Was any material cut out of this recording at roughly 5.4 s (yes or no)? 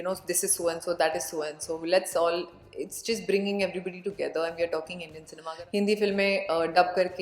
yes